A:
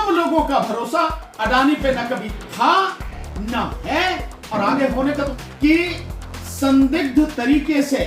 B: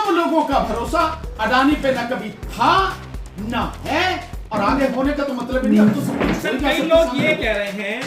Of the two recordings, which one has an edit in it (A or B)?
A